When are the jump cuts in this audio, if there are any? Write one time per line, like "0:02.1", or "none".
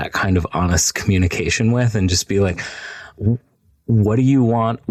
none